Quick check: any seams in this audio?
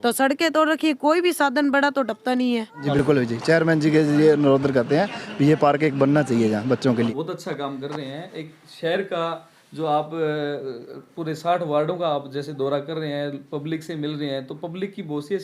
yes; 2 cuts; at 3.0 s, 7.1 s

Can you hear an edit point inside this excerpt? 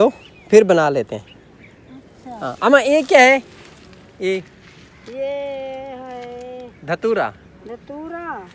no; 0 cuts

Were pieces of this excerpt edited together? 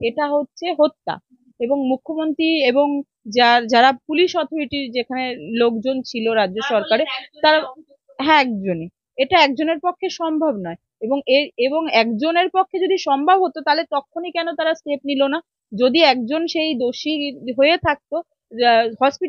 no; 0 cuts

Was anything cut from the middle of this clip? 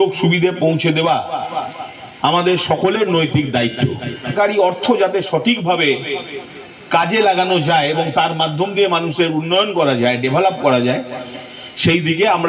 yes; 1 cut; at 4.3 s

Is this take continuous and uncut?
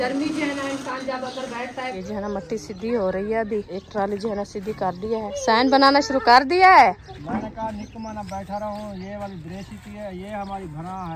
no; 4 cuts; at 2.0 s, 3.7 s, 5.3 s, 7.1 s

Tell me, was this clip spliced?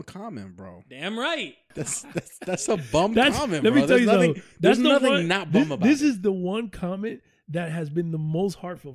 yes; 1 cut; at 2.0 s

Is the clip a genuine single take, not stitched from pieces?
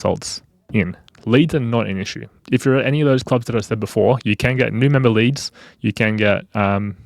no; 1 cut; at 1.1 s

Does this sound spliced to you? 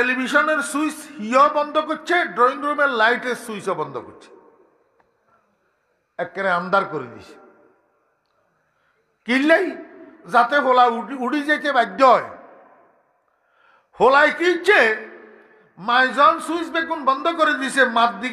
no; 0 cuts

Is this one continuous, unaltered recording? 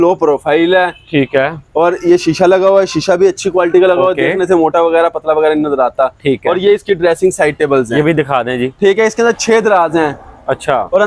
yes; 0 cuts

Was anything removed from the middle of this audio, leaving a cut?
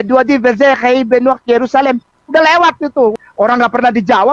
yes; 1 cut; at 3.2 s

